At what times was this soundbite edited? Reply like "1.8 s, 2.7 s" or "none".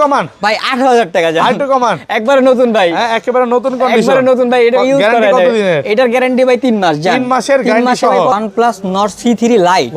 8.3 s

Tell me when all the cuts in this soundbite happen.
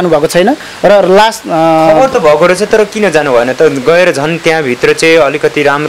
none

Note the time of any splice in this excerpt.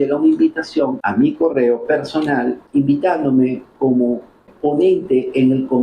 1.0 s, 2.6 s, 4.5 s

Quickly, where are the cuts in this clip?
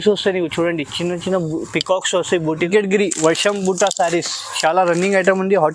2.7 s

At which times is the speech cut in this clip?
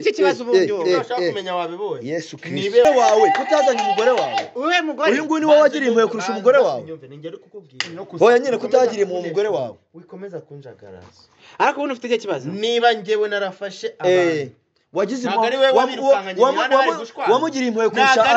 2.8 s

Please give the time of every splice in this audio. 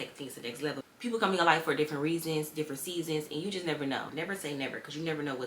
0.9 s, 4.0 s

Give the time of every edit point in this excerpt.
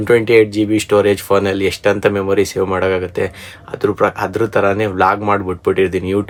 none

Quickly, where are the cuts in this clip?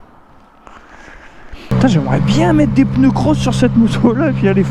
1.7 s

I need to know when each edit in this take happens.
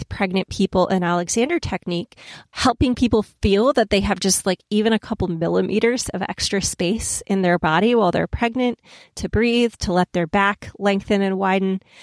none

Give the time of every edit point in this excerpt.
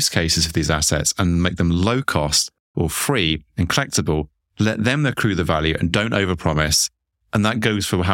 none

